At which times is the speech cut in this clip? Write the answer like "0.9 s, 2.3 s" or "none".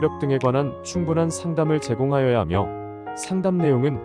none